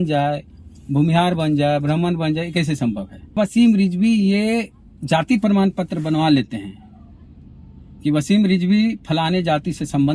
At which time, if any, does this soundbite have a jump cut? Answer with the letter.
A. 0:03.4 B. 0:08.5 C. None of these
A